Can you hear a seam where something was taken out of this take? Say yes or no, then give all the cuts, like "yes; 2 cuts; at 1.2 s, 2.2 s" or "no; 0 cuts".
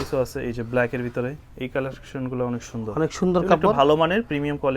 no; 0 cuts